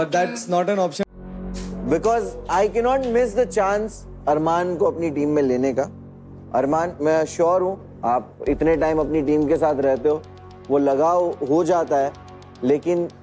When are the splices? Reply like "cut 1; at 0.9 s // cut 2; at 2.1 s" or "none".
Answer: cut 1; at 1.1 s